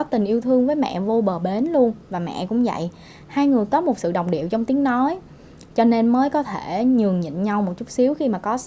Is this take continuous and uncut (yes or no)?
yes